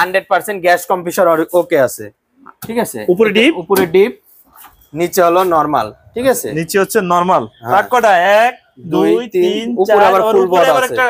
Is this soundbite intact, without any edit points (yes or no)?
yes